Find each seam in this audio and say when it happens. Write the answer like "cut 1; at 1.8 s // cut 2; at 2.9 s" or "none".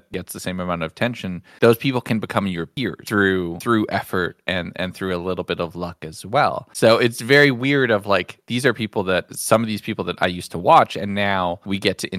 none